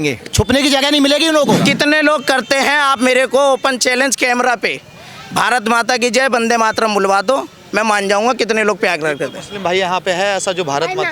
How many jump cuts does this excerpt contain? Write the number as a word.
one